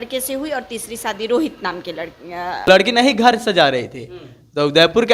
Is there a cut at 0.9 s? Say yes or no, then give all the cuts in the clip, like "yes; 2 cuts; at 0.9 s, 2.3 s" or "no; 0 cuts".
no; 1 cut; at 2.7 s